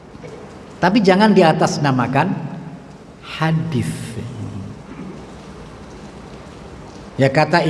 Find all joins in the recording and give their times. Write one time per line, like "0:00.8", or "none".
none